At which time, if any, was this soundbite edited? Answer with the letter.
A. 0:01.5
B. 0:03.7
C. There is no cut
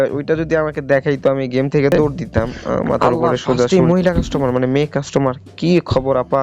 B